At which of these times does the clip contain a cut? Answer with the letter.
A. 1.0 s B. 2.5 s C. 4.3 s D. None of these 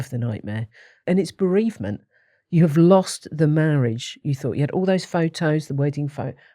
A